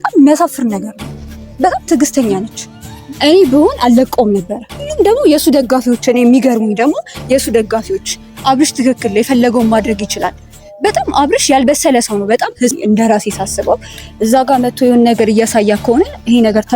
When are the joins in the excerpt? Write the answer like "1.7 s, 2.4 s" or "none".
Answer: 4.9 s, 12.8 s

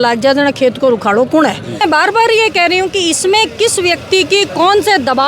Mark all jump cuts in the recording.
1.8 s

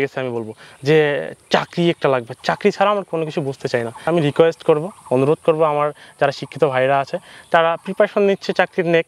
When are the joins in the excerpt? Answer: 4.1 s

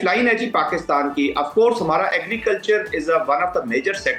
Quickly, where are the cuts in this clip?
none

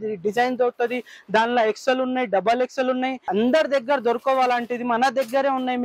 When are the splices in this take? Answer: none

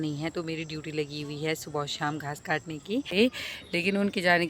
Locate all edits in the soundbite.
3.1 s

